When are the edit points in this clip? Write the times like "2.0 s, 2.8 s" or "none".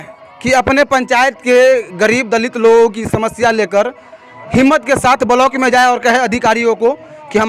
none

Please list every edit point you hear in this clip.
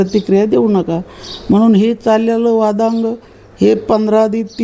none

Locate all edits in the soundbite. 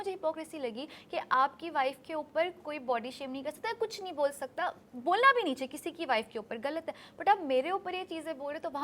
none

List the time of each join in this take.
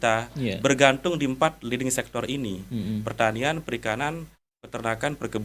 none

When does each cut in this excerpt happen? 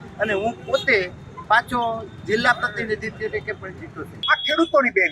4.1 s

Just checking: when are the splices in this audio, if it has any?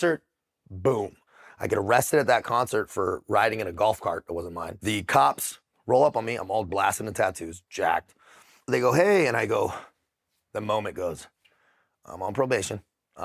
1.3 s, 4.8 s, 8.6 s

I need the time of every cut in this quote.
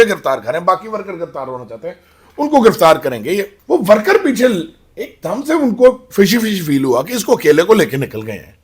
3.5 s

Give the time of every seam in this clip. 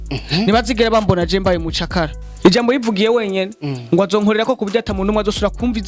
2.2 s

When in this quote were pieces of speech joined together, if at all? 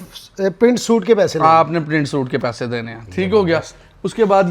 none

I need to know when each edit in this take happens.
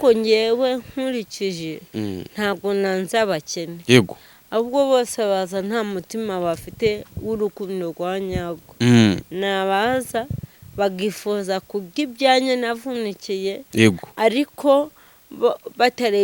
none

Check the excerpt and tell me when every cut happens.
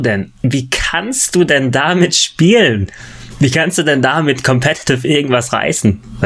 none

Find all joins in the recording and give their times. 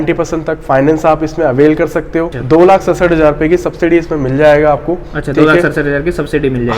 2.4 s

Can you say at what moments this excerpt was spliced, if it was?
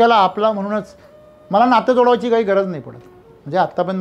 none

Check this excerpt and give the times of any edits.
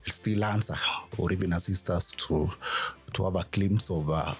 none

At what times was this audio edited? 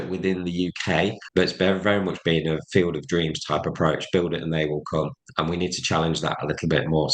1.2 s

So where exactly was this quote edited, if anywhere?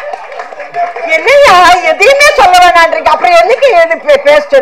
none

